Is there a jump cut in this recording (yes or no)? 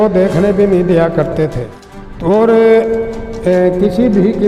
yes